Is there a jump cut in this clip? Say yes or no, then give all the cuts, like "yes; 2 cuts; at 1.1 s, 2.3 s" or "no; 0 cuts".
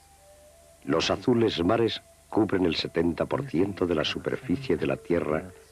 no; 0 cuts